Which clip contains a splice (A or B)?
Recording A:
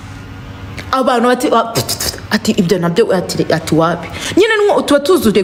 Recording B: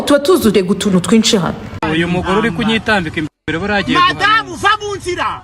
B